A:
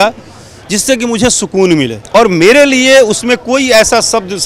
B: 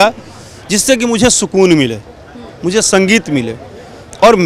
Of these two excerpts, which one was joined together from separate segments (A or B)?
A